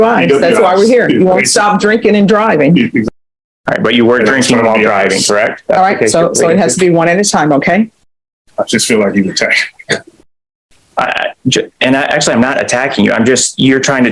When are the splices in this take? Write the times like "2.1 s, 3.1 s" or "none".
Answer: 3.0 s